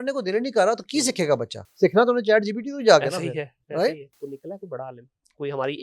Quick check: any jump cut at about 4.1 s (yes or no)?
yes